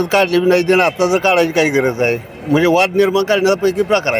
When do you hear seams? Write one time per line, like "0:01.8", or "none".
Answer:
none